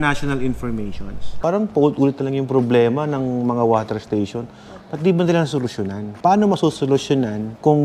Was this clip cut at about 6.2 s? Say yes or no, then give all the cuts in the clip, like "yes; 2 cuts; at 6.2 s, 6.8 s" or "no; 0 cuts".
yes; 2 cuts; at 1.3 s, 6.2 s